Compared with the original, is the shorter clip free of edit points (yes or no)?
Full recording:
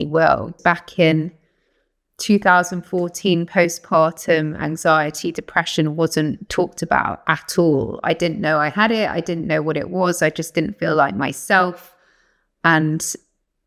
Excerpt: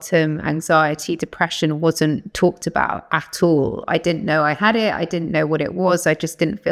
yes